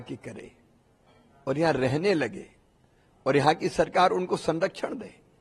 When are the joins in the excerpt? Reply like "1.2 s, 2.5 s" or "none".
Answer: none